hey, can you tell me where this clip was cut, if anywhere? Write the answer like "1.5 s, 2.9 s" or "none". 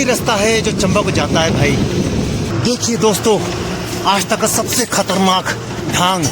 2.5 s